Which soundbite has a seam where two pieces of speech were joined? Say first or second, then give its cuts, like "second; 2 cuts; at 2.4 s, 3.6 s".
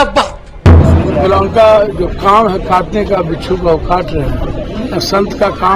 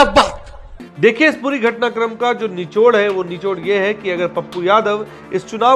first; 2 cuts; at 0.8 s, 4.6 s